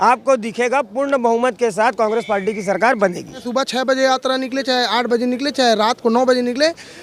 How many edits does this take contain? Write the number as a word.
one